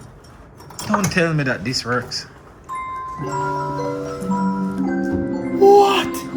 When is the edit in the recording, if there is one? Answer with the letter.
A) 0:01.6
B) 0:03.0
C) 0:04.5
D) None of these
D